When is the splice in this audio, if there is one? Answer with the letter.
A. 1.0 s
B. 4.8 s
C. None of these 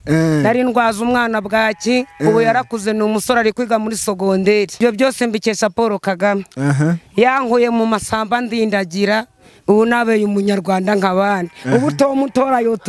B